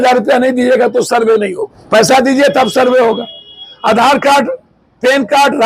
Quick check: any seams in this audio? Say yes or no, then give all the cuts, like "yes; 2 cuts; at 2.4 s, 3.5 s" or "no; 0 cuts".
yes; 1 cut; at 1.7 s